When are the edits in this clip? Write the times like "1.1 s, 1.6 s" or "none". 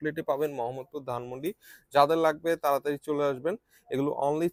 none